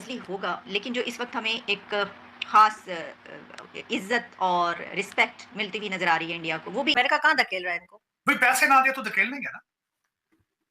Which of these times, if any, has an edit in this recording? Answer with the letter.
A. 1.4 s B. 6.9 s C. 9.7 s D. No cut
B